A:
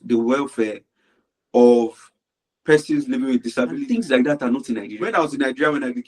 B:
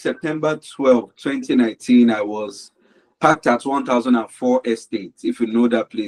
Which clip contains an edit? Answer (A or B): A